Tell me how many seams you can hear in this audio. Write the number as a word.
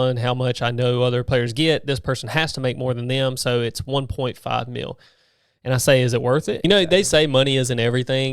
two